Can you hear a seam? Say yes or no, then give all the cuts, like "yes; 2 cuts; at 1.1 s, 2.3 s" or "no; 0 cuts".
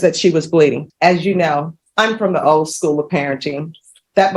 yes; 2 cuts; at 0.8 s, 1.8 s